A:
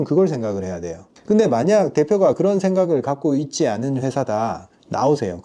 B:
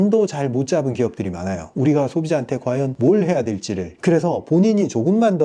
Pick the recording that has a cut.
B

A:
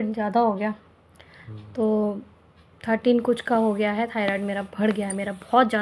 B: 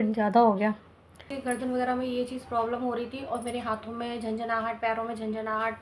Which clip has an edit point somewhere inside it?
B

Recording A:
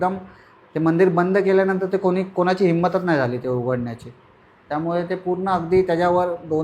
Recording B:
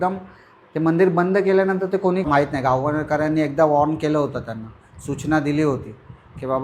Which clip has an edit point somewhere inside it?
B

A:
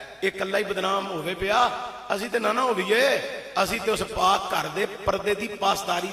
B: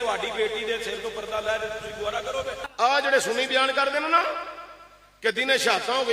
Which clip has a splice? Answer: B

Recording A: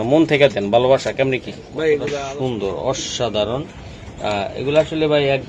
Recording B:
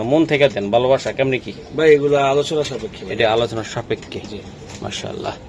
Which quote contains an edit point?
A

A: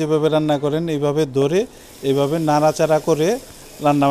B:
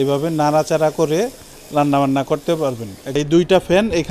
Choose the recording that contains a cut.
B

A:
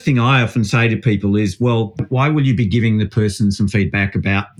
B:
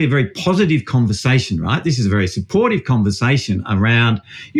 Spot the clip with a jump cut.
A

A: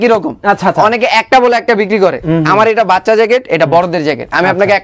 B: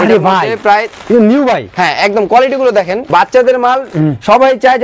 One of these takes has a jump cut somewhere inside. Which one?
B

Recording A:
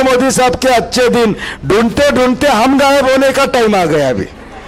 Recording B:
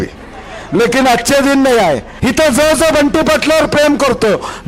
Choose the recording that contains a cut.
B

